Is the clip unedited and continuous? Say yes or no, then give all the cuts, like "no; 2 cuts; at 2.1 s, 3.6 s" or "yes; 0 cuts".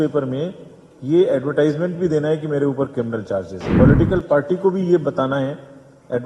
no; 1 cut; at 3.6 s